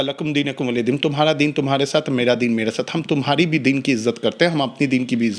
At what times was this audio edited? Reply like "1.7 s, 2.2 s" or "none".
none